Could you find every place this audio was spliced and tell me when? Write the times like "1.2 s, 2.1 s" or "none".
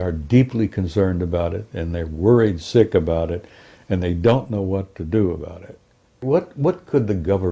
6.2 s